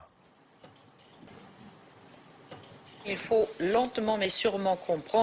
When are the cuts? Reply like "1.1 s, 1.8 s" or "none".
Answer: 1.3 s